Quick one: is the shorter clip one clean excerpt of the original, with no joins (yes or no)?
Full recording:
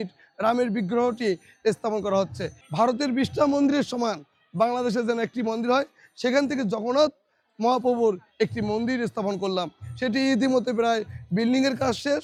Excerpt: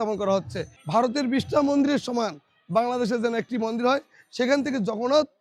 yes